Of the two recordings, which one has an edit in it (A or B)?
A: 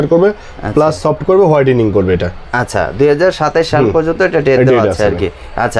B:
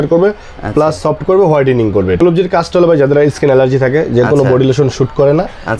B